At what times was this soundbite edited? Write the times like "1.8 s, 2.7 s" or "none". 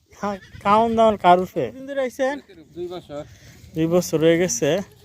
1.8 s